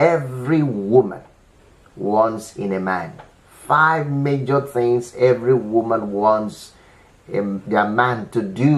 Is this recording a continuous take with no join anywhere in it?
yes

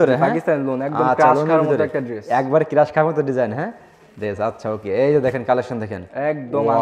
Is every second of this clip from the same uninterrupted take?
yes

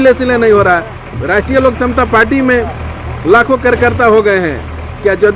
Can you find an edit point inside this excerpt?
no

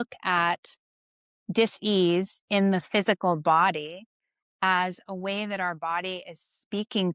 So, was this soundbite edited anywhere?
no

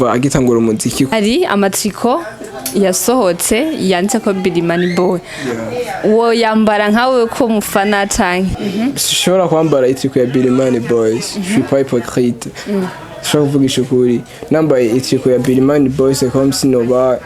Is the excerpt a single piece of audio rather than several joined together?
no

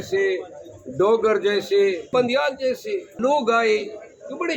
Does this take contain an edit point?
yes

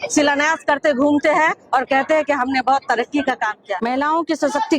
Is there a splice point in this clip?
yes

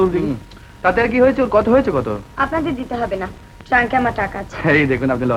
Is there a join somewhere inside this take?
no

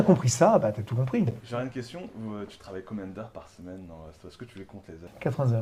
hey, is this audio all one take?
yes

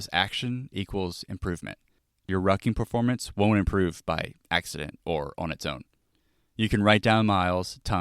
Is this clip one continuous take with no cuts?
no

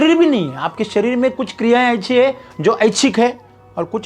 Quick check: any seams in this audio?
no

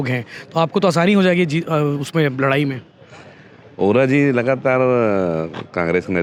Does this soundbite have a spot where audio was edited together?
no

